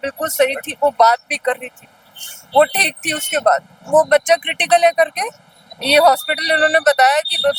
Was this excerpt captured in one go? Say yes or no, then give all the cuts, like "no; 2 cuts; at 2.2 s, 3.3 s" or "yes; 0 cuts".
yes; 0 cuts